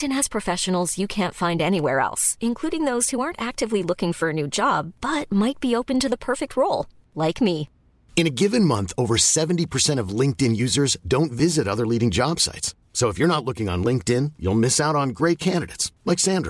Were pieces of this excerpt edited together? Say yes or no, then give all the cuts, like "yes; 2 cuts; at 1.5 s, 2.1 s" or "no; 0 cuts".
no; 0 cuts